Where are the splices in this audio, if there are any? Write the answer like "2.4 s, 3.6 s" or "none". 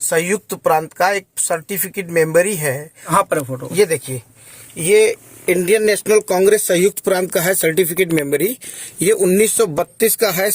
3.1 s